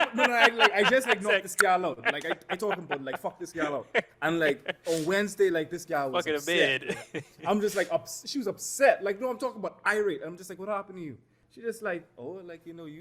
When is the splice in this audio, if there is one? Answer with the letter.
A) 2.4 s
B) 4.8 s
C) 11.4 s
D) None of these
C